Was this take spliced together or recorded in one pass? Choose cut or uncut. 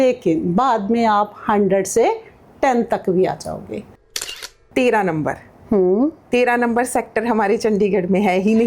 cut